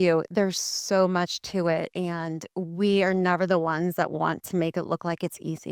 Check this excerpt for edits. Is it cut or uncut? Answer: uncut